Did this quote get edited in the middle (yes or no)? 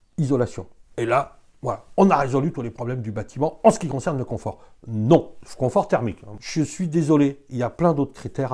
no